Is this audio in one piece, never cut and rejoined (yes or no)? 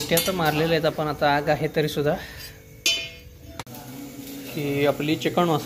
no